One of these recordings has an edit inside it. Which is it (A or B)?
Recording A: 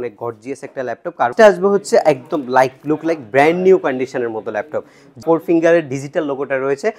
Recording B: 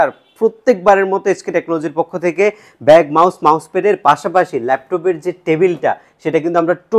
A